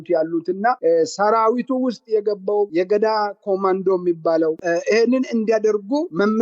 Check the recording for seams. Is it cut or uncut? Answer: cut